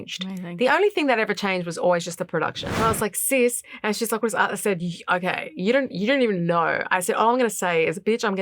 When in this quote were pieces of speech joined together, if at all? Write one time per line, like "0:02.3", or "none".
0:02.7